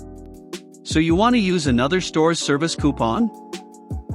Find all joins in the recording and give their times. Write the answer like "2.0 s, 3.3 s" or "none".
0.9 s